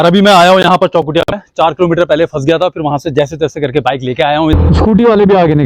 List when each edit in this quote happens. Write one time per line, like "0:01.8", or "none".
0:04.5